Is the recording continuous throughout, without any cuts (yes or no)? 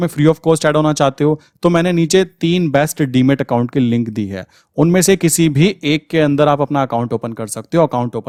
yes